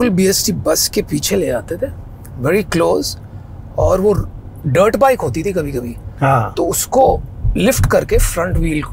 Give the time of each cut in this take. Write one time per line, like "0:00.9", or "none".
none

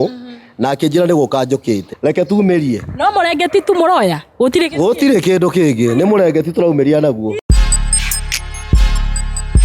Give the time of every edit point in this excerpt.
0:01.9
0:07.4

